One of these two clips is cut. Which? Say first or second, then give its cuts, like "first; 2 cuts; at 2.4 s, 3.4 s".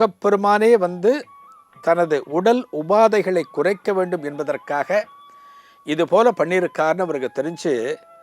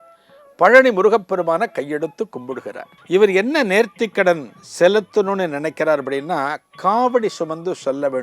second; 1 cut; at 2.9 s